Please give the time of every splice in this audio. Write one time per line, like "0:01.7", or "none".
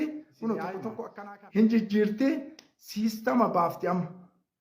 0:01.0